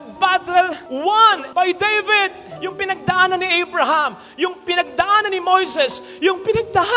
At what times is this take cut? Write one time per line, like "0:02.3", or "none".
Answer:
none